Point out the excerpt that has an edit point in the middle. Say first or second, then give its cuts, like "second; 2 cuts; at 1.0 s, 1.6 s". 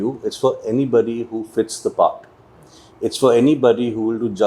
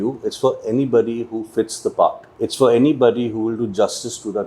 second; 1 cut; at 2.3 s